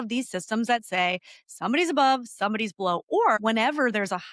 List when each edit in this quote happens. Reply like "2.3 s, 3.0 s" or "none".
3.4 s